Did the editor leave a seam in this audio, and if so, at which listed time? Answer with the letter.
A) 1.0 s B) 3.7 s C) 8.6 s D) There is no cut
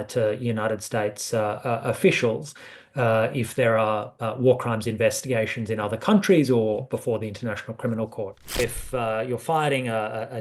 C